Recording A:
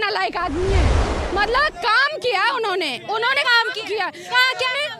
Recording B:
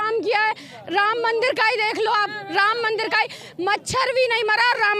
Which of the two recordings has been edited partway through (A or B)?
A